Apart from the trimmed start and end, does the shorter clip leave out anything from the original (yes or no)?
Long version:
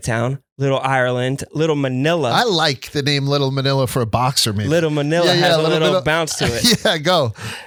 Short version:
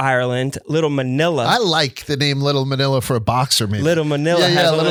no